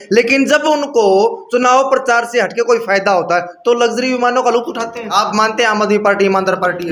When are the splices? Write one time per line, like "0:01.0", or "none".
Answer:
0:05.1